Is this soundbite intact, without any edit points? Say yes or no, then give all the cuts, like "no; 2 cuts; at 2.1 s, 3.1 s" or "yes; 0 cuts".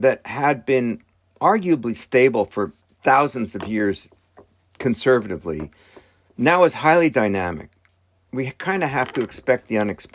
yes; 0 cuts